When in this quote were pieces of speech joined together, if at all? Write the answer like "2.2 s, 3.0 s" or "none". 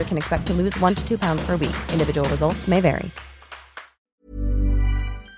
3.7 s